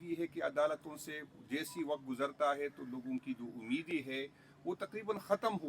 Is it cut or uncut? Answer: uncut